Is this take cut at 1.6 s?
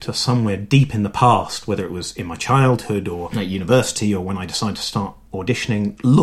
no; 0 cuts

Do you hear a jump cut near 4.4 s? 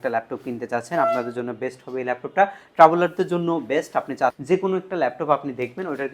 yes; 1 cut; at 4.4 s

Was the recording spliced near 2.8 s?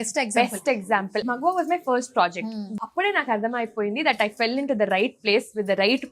yes; 2 cuts; at 1.2 s, 2.8 s

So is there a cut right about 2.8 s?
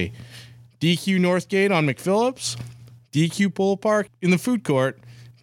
no; 1 cut; at 4.1 s

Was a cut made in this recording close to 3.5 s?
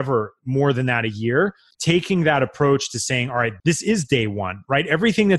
yes; 2 cuts; at 1.7 s, 3.5 s

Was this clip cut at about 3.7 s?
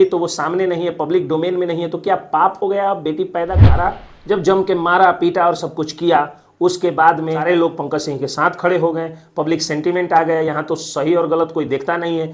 yes; 1 cut; at 3.7 s

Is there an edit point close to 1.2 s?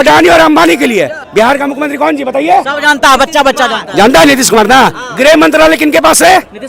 yes; 1 cut; at 1.2 s

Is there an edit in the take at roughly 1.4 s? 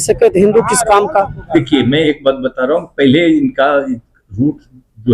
yes; 1 cut; at 1.4 s

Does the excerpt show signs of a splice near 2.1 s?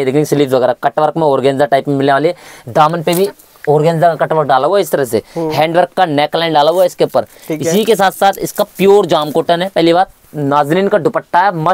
no; 0 cuts

